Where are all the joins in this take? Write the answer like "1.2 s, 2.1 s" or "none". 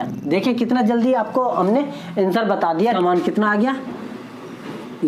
3.0 s